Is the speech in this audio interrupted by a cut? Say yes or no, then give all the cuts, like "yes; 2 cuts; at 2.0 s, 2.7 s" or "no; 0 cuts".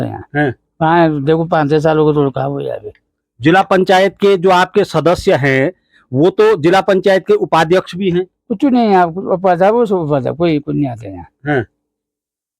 no; 0 cuts